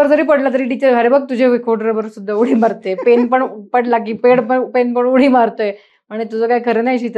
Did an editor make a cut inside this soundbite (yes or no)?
no